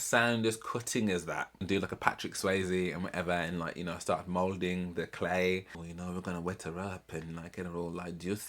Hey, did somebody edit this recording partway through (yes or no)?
yes